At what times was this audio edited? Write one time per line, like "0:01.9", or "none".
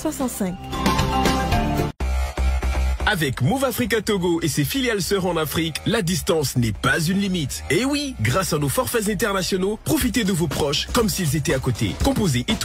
0:01.9